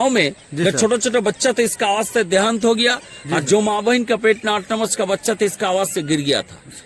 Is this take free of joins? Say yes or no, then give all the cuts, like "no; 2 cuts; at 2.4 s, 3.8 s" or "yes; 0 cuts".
yes; 0 cuts